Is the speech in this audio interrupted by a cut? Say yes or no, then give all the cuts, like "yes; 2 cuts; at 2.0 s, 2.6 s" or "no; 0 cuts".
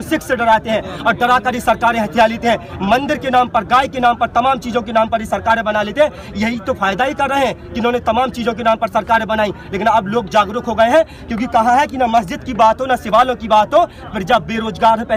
no; 0 cuts